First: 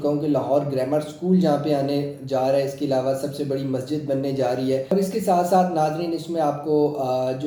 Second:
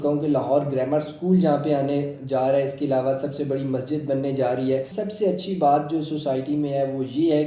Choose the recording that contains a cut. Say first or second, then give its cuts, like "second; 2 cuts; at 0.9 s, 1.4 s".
second; 1 cut; at 4.8 s